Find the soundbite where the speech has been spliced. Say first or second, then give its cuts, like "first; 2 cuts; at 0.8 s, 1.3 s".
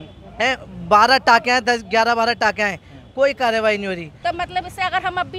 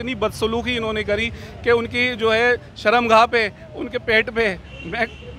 first; 1 cut; at 4.1 s